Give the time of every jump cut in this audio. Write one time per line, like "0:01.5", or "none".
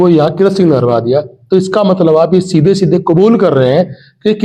none